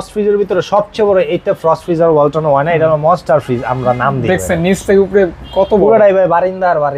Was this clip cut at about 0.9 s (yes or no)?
no